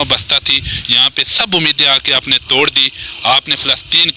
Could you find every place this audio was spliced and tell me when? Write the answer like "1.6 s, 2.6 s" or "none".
none